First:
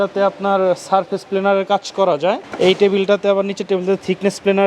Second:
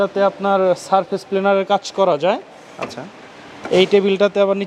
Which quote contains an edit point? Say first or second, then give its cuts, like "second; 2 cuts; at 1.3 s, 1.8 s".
first; 1 cut; at 2.5 s